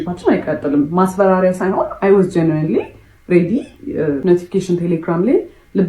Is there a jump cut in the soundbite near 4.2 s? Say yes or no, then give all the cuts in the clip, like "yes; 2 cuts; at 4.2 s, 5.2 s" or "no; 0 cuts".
yes; 1 cut; at 4.2 s